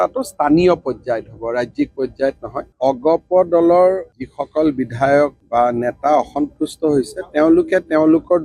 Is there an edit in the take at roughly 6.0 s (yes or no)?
no